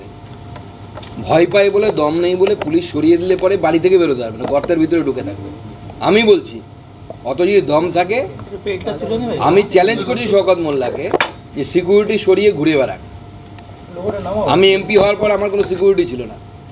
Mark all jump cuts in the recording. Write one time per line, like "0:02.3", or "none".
none